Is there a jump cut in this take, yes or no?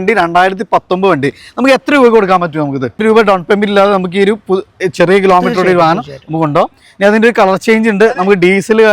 yes